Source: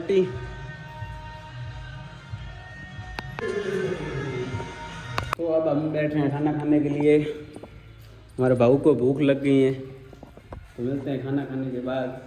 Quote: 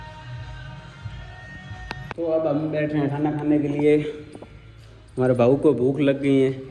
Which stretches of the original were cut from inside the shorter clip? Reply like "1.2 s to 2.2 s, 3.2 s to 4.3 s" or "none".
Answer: 3.4 s to 5.4 s